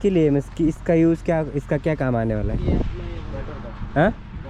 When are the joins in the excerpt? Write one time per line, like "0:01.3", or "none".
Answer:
none